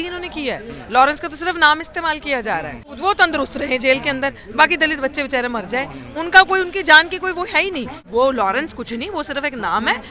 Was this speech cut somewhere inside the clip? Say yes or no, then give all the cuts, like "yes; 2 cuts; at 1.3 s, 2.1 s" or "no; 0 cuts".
yes; 2 cuts; at 2.9 s, 8.0 s